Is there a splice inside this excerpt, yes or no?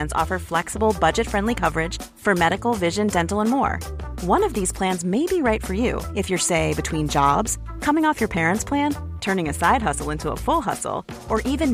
no